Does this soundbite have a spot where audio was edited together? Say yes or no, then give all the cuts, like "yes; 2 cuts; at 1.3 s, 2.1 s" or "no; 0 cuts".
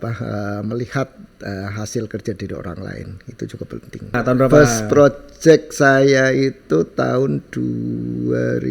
yes; 1 cut; at 4.2 s